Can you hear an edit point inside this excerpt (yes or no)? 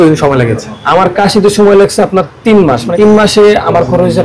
yes